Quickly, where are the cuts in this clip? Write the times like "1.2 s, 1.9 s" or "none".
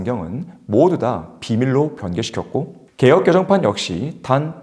2.8 s